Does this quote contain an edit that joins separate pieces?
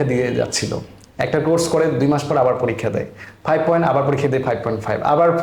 no; 0 cuts

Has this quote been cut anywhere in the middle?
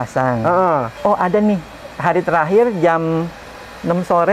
yes; 1 cut; at 0.9 s

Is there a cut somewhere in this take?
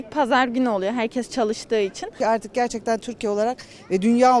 yes; 1 cut; at 2.1 s

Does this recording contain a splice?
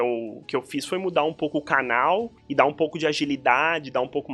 yes; 1 cut; at 2.4 s

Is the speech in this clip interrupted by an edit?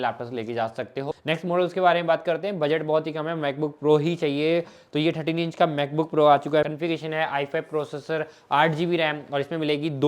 yes; 2 cuts; at 1.1 s, 6.7 s

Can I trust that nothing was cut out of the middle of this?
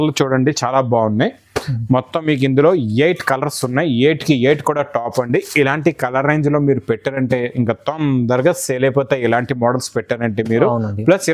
yes; 0 cuts

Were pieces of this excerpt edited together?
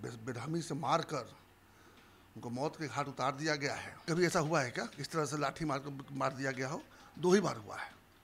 yes; 1 cut; at 3.9 s

